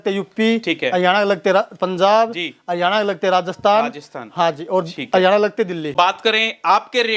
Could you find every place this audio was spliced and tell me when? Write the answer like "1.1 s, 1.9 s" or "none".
5.9 s